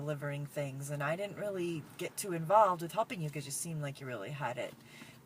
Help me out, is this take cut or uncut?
cut